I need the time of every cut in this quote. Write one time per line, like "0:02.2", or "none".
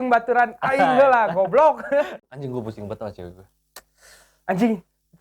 0:02.1